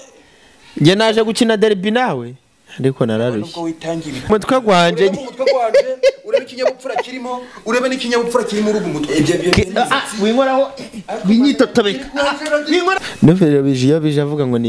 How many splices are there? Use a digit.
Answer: 2